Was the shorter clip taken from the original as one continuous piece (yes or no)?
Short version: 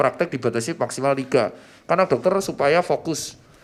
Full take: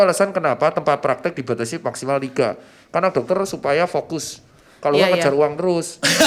yes